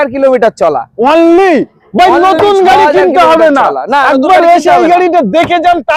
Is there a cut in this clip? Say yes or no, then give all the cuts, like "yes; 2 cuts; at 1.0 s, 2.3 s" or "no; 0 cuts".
no; 0 cuts